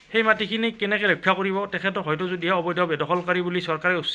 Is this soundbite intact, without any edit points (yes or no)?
yes